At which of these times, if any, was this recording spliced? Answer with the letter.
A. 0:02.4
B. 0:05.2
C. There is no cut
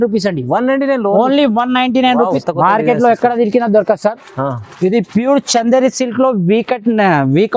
A